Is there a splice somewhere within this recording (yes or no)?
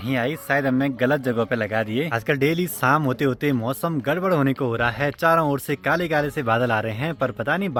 no